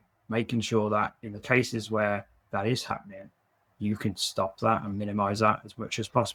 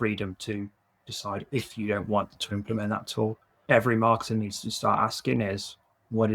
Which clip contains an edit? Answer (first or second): second